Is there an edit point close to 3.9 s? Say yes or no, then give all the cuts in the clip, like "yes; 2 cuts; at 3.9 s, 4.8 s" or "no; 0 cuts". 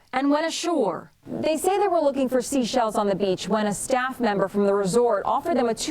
yes; 1 cut; at 3.9 s